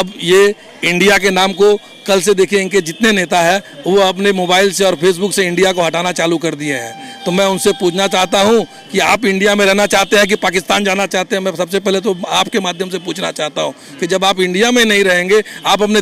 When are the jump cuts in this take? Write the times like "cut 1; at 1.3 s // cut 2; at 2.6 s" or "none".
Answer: none